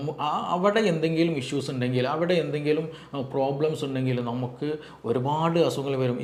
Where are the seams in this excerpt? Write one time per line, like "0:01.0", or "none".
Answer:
none